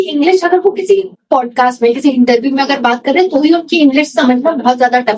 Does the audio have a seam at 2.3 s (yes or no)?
no